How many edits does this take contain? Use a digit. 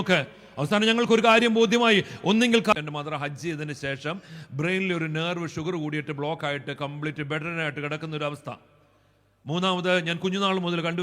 1